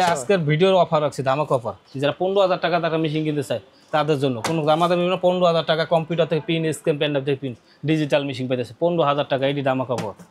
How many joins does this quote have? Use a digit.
0